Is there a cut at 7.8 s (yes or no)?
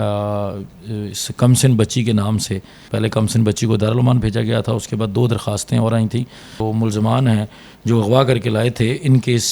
no